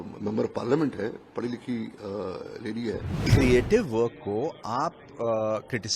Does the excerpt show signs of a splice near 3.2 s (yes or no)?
yes